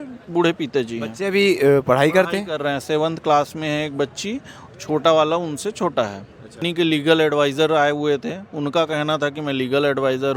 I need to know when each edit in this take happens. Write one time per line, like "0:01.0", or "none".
0:06.6